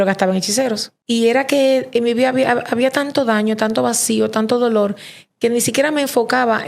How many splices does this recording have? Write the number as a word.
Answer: one